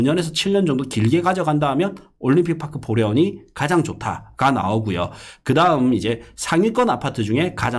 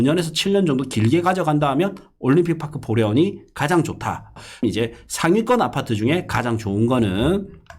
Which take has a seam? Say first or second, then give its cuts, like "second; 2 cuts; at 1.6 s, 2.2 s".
second; 1 cut; at 4.6 s